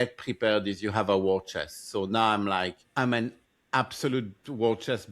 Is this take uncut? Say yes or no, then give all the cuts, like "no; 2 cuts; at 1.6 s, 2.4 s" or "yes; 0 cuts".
no; 1 cut; at 2.8 s